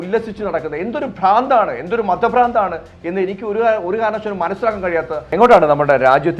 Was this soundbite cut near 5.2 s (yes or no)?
yes